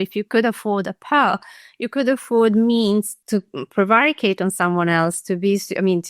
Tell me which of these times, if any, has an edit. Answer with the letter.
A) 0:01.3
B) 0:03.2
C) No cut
B